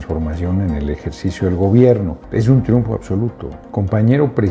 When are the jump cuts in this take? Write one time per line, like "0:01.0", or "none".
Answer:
0:02.2